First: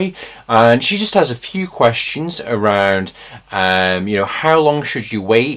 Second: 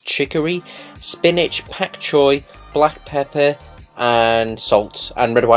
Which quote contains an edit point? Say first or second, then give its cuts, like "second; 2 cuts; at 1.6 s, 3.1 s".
second; 1 cut; at 2.2 s